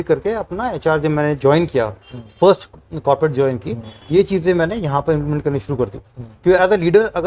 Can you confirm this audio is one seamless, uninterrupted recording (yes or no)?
yes